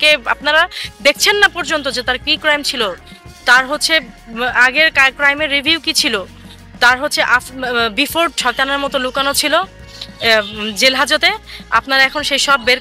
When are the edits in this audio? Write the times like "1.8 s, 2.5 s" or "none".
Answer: 8.4 s